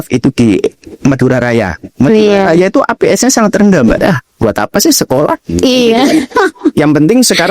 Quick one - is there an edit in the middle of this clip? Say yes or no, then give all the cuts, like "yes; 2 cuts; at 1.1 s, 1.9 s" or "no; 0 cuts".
yes; 1 cut; at 4.0 s